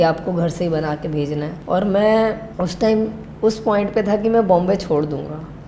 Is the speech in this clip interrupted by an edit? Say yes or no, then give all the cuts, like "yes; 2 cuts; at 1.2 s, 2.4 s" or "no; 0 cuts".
yes; 2 cuts; at 1.6 s, 2.5 s